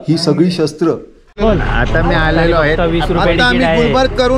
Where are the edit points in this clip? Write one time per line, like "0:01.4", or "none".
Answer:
0:01.2